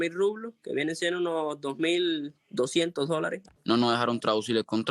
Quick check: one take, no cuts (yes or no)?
no